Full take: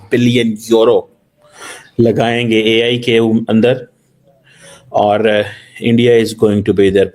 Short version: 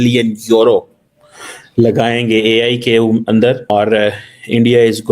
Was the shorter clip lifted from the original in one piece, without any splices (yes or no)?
no